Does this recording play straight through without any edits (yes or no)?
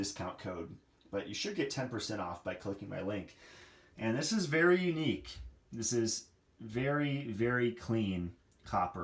yes